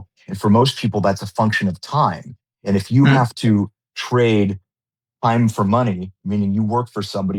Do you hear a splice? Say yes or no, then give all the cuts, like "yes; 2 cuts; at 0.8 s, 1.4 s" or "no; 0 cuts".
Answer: no; 0 cuts